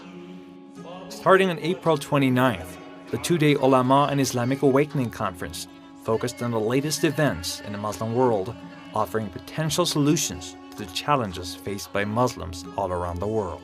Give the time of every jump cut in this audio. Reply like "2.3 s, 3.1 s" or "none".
10.1 s